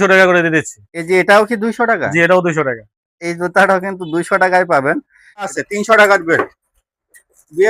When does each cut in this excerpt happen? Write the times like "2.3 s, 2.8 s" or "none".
5.5 s